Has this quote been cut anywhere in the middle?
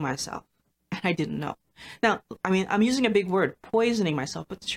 no; 0 cuts

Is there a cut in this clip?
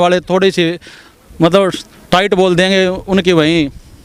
no; 0 cuts

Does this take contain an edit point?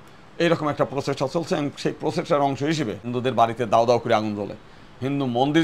yes; 1 cut; at 3.0 s

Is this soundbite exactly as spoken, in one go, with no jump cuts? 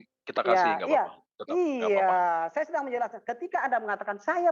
yes; 0 cuts

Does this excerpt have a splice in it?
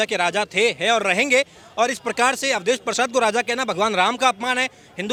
no; 0 cuts

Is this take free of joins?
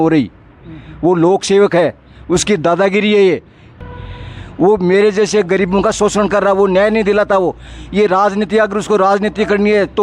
no; 1 cut; at 3.8 s

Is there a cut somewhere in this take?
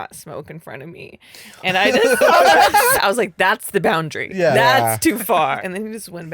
yes; 2 cuts; at 2.9 s, 5.6 s

